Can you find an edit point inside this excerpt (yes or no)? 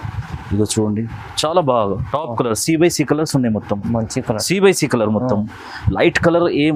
no